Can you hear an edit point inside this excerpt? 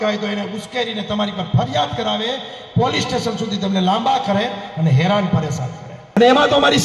yes; 1 cut; at 5.9 s

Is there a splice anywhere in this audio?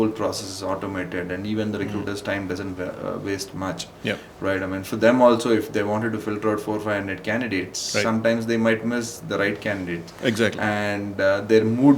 no; 0 cuts

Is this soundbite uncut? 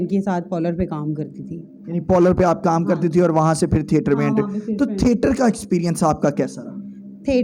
yes; 0 cuts

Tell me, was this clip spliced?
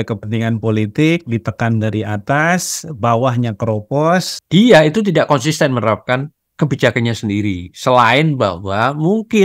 yes; 1 cut; at 4.3 s

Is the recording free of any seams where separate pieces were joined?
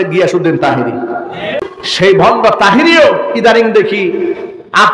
no; 1 cut; at 1.8 s

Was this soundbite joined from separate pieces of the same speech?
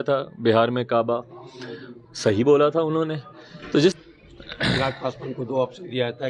yes; 1 cut; at 3.9 s

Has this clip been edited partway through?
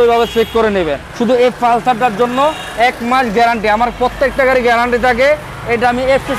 yes; 1 cut; at 1.0 s

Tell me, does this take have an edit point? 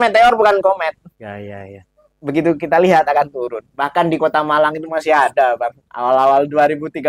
no; 0 cuts

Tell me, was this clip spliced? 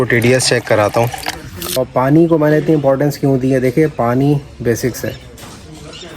yes; 1 cut; at 1.7 s

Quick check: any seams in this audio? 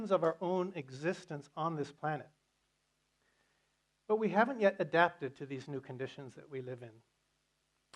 yes; 1 cut; at 1.9 s

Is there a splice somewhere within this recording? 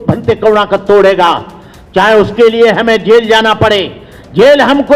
no; 0 cuts

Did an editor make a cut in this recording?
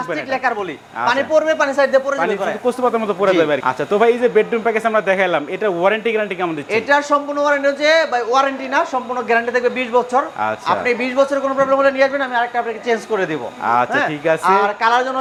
no; 0 cuts

